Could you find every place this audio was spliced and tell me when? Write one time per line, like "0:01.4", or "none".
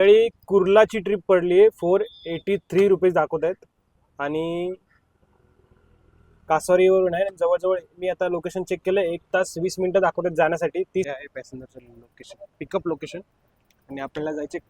0:11.2